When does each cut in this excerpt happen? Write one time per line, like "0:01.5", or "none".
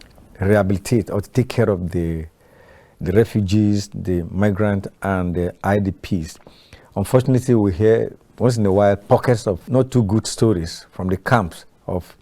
0:09.6